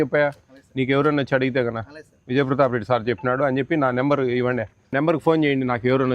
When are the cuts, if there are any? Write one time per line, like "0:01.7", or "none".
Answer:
0:04.9